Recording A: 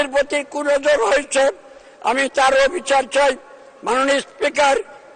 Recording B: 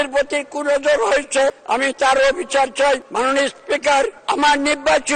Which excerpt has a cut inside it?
B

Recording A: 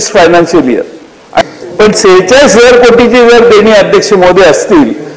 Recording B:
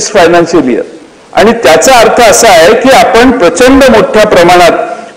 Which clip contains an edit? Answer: A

